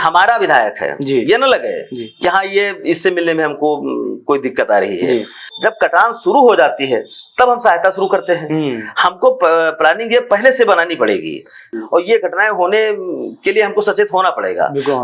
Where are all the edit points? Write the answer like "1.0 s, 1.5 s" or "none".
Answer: 5.4 s, 11.8 s